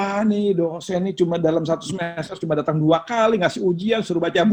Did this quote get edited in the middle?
no; 0 cuts

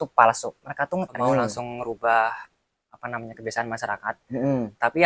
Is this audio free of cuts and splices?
no; 1 cut; at 1.2 s

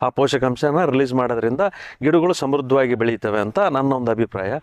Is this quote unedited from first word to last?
yes; 0 cuts

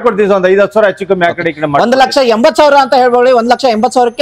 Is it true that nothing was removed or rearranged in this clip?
yes; 0 cuts

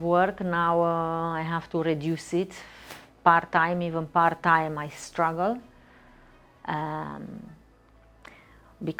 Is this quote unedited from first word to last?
yes; 0 cuts

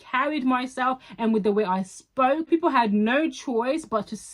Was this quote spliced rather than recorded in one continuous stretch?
yes; 1 cut; at 2.5 s

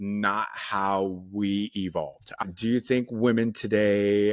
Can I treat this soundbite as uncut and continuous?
no; 1 cut; at 2.3 s

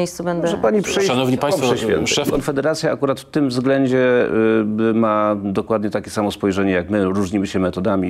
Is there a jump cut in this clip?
yes; 1 cut; at 2.3 s

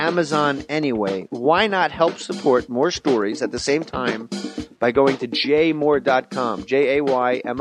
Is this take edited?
no; 0 cuts

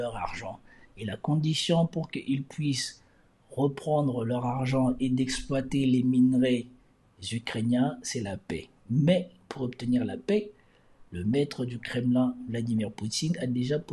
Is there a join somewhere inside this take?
no; 0 cuts

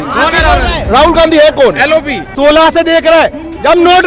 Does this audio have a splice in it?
yes; 1 cut; at 2.3 s

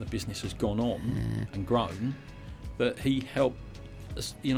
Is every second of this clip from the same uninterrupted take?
yes; 0 cuts

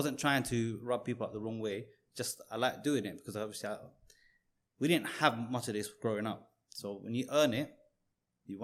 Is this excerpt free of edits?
yes; 0 cuts

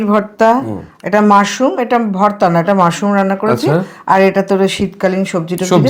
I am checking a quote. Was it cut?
no; 0 cuts

